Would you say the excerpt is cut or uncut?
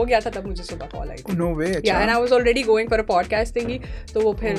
uncut